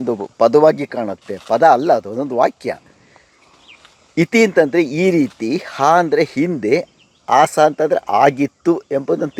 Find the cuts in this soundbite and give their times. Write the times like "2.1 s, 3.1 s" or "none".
none

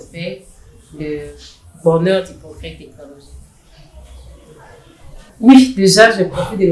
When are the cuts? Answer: 5.2 s

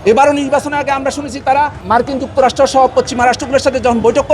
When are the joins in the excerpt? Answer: 1.8 s

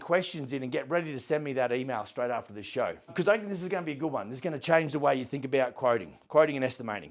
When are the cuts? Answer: 3.1 s

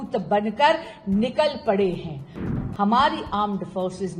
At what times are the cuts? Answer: 2.5 s

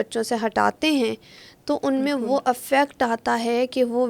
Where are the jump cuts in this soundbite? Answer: none

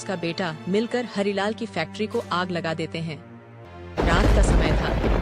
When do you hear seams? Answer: 3.5 s

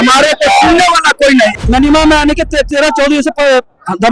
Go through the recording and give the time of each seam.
1.6 s

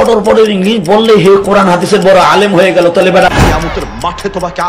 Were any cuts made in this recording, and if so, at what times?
3.3 s

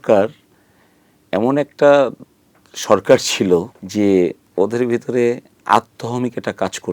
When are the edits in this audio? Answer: 3.8 s, 4.4 s

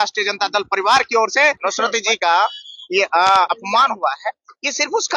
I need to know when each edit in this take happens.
1.6 s

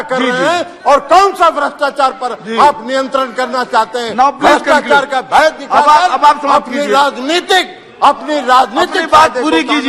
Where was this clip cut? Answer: none

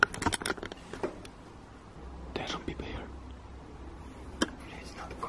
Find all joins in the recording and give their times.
1.9 s

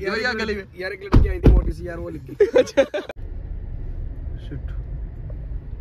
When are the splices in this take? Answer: 3.1 s

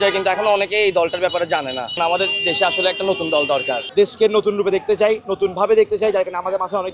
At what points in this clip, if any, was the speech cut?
2.0 s, 3.8 s

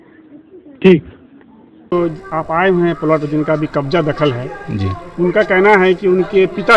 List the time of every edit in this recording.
1.9 s

